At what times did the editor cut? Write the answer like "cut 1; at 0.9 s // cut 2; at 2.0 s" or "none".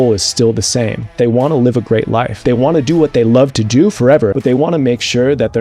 cut 1; at 1.1 s // cut 2; at 2.3 s // cut 3; at 4.4 s